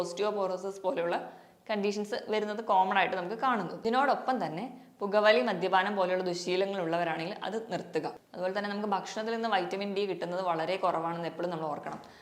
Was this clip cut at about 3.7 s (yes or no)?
yes